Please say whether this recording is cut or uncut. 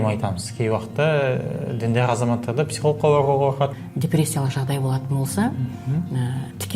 cut